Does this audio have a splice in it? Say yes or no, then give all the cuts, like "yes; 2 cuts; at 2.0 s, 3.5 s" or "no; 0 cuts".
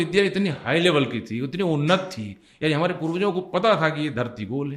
no; 0 cuts